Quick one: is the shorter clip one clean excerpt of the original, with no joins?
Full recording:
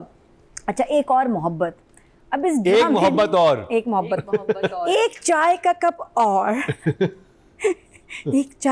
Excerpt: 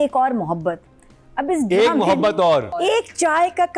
no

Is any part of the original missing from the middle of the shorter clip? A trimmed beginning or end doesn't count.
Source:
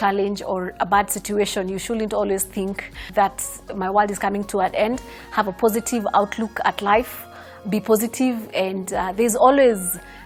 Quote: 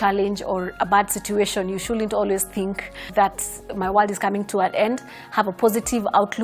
no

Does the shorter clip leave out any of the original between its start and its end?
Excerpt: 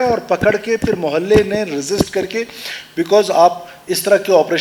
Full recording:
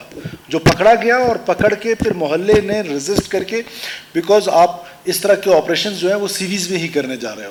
no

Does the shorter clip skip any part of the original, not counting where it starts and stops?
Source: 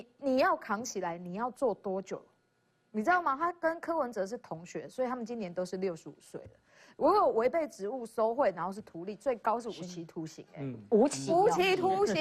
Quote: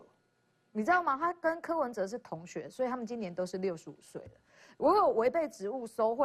no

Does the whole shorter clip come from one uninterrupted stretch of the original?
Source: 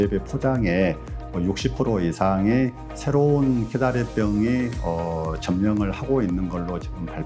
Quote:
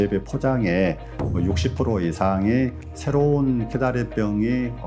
yes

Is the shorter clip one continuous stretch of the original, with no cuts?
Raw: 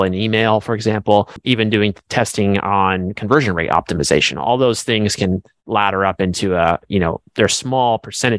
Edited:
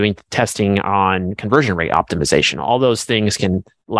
yes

